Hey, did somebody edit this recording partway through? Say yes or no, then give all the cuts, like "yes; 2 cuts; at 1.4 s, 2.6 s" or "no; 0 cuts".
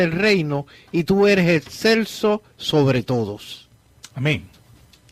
no; 0 cuts